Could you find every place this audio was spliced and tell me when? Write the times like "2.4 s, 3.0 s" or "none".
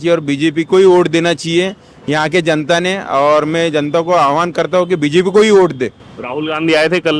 none